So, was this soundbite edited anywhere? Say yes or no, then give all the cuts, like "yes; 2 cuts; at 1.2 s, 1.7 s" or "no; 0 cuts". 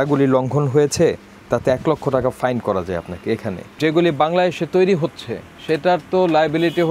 yes; 1 cut; at 3.8 s